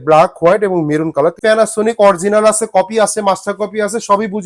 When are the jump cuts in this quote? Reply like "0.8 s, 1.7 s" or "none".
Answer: 1.4 s